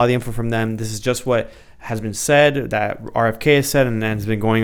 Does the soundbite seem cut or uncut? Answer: uncut